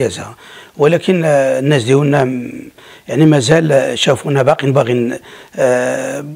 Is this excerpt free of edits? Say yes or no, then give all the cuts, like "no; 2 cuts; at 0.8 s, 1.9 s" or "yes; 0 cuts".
yes; 0 cuts